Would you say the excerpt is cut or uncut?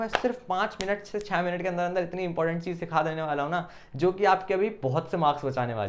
uncut